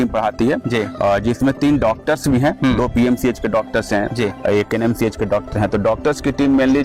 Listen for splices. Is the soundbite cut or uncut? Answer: uncut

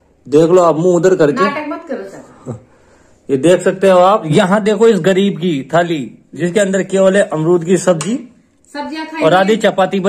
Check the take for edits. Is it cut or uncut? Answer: uncut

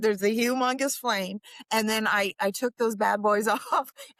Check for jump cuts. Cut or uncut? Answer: uncut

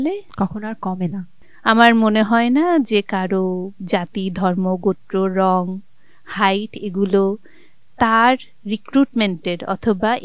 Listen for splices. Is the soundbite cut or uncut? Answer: cut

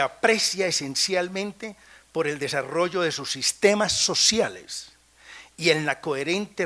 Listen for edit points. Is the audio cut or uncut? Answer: uncut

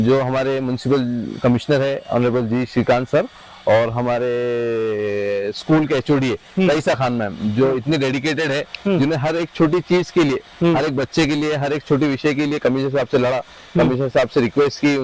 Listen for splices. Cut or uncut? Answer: uncut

